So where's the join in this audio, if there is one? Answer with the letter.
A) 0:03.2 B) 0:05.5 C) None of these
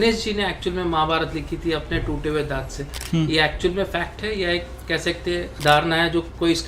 B